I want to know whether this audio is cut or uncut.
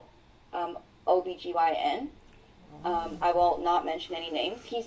uncut